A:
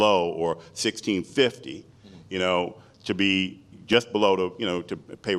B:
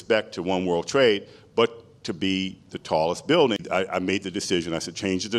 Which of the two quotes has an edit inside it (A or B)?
B